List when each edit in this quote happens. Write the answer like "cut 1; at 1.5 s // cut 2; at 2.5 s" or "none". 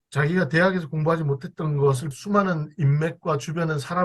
cut 1; at 2.2 s